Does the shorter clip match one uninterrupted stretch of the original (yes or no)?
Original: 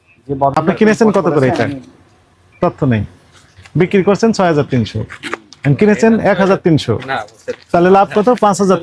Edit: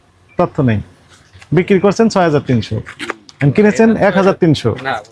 yes